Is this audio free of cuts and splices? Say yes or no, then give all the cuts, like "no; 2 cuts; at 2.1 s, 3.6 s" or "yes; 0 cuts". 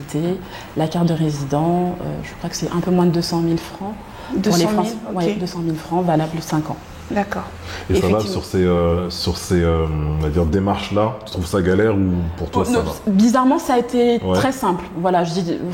yes; 0 cuts